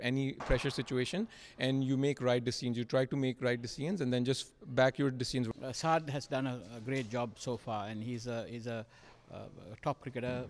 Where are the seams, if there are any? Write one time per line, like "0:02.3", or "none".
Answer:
0:05.5